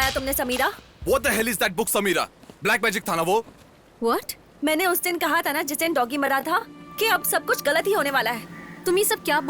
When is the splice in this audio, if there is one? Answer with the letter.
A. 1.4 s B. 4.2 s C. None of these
C